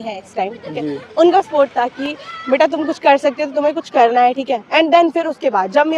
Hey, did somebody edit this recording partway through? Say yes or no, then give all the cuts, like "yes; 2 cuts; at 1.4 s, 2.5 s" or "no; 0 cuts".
no; 0 cuts